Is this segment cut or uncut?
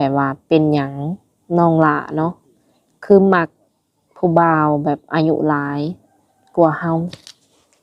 uncut